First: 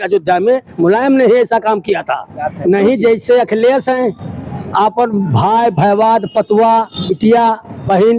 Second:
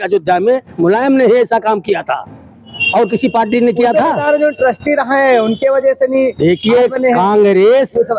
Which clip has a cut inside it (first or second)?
first